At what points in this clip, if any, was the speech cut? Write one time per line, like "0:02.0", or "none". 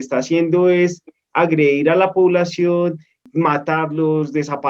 0:03.2